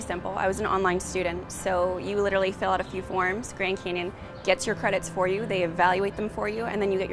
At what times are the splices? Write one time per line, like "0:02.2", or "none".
none